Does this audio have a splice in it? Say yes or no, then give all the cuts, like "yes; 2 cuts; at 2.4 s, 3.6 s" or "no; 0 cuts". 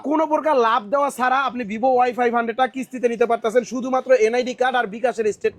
no; 0 cuts